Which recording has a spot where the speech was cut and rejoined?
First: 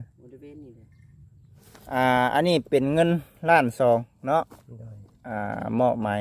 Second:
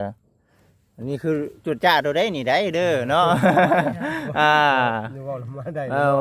first; 1 cut; at 1.6 s

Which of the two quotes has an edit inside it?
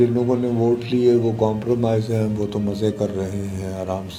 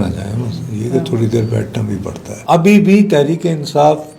second; 1 cut; at 2.3 s

